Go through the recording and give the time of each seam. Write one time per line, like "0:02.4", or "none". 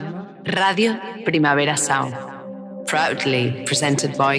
none